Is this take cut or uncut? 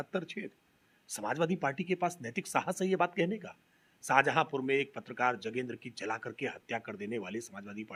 uncut